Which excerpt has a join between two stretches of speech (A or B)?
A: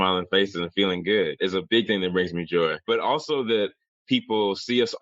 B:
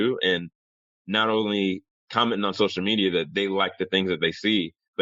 A